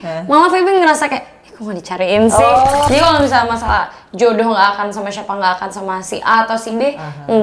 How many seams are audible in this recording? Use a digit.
1